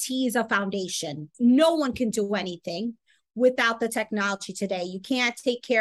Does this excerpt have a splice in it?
yes; 1 cut; at 1.2 s

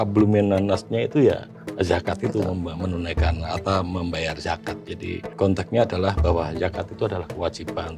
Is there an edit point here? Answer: yes; 2 cuts; at 1.6 s, 5.3 s

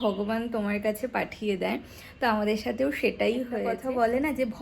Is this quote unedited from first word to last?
no; 1 cut; at 3.7 s

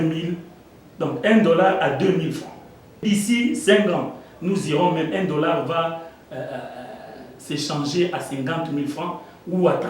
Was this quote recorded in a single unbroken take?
no; 1 cut; at 3.0 s

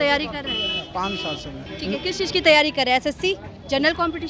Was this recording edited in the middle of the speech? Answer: yes; 1 cut; at 1.6 s

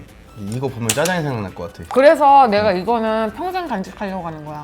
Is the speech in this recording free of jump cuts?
yes; 0 cuts

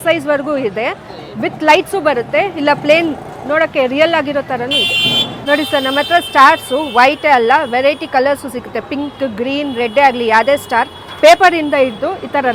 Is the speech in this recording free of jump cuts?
yes; 0 cuts

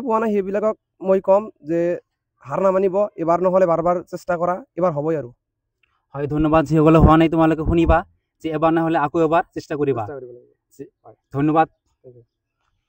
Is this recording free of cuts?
yes; 0 cuts

